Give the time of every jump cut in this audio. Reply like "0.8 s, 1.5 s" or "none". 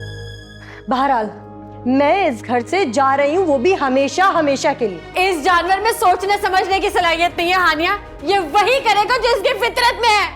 5.0 s